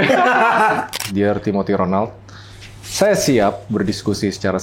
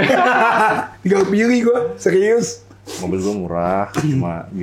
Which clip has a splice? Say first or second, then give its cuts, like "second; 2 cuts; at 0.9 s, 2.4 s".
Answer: first; 1 cut; at 0.9 s